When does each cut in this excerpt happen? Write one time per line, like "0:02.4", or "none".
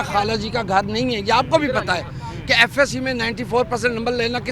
none